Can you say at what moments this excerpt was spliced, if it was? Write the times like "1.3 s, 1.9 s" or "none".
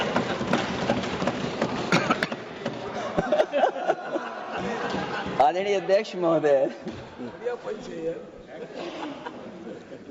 none